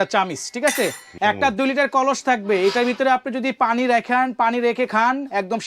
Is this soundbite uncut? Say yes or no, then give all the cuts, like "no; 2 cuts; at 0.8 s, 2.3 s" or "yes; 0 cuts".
no; 1 cut; at 1.0 s